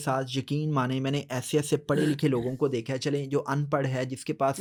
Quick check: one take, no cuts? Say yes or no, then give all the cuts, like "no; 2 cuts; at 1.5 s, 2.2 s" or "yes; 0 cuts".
yes; 0 cuts